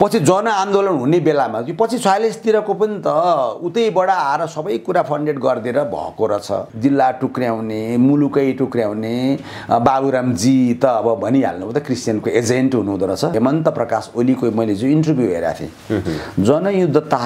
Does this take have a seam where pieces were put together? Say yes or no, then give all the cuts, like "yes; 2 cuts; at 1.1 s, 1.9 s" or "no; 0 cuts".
yes; 2 cuts; at 6.7 s, 13.3 s